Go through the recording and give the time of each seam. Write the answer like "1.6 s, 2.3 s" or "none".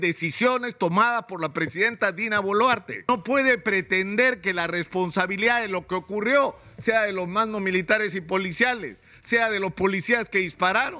2.9 s